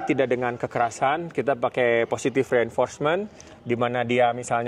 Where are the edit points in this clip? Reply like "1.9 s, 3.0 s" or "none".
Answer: none